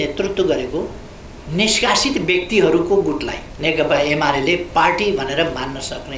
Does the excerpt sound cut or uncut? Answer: cut